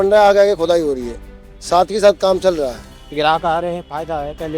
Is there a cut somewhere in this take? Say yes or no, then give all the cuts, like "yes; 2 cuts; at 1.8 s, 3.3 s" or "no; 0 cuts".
yes; 1 cut; at 3.0 s